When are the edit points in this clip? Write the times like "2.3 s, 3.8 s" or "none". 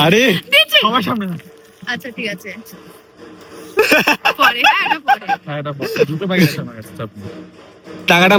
none